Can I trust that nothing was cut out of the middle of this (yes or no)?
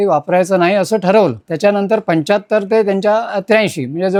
yes